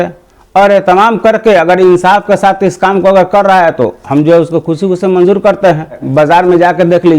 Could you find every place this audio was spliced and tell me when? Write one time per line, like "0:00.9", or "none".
0:06.0